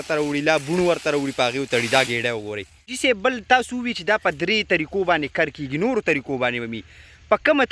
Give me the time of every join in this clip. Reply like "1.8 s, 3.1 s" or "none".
2.9 s